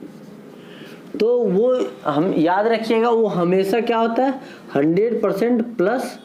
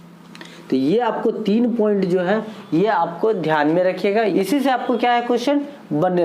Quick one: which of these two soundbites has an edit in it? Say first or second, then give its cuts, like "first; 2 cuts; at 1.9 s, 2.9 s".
second; 1 cut; at 4.4 s